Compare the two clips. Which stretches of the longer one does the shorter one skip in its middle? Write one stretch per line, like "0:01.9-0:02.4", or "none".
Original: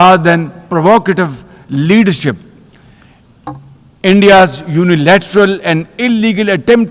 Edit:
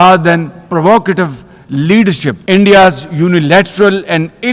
0:02.4-0:04.0